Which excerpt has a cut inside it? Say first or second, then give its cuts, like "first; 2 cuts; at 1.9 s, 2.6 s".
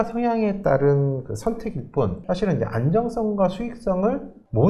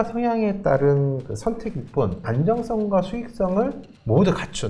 second; 1 cut; at 2.2 s